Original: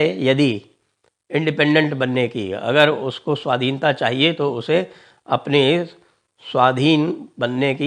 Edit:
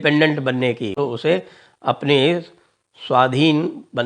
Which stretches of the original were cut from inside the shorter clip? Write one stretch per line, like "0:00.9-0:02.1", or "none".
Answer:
0:02.5-0:04.4